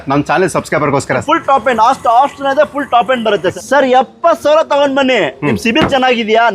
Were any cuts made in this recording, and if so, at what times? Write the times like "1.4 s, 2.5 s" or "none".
1.2 s, 3.5 s